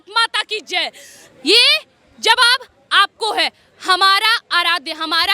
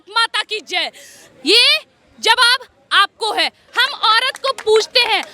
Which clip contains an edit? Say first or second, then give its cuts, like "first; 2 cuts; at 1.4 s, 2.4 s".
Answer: second; 1 cut; at 3.7 s